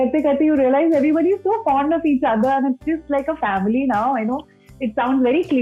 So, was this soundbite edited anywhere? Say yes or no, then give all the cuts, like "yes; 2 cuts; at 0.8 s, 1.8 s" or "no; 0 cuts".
no; 0 cuts